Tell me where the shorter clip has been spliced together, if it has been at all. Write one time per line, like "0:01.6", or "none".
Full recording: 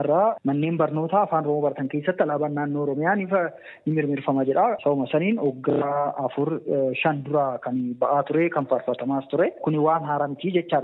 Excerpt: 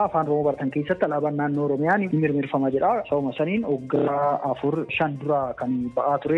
0:02.1
0:04.9